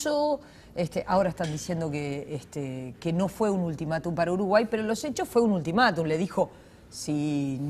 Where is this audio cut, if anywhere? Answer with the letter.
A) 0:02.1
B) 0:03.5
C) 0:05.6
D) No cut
C